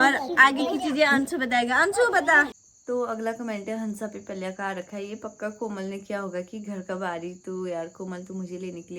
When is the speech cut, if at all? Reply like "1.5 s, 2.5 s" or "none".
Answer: 2.7 s

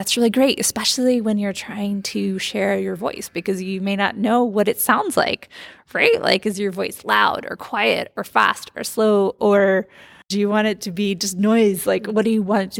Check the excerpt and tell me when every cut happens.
10.2 s

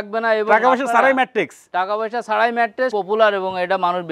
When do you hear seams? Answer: 2.9 s

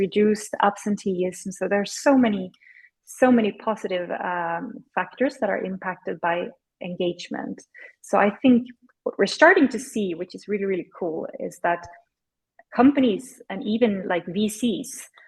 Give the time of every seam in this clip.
none

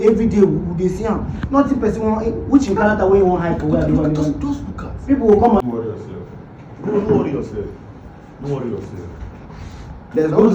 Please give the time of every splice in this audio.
5.6 s

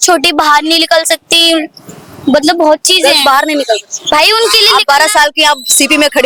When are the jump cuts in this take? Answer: none

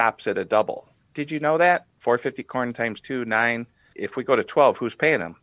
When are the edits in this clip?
1.9 s, 3.9 s

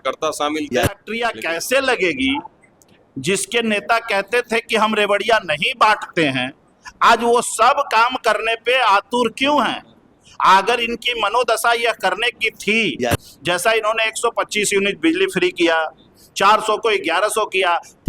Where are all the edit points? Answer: 1.1 s

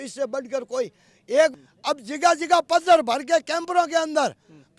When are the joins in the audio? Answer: 1.5 s

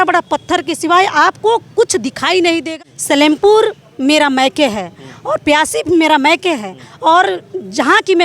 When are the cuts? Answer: 2.7 s

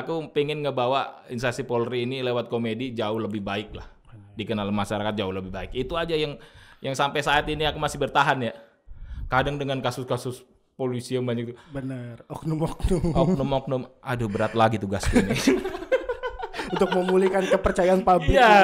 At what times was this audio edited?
none

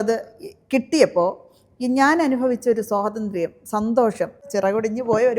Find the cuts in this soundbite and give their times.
4.4 s

